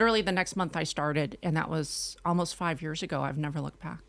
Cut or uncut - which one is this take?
uncut